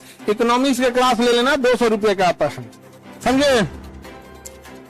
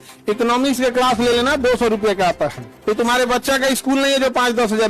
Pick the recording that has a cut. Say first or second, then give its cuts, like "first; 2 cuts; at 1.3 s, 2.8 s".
second; 1 cut; at 2.7 s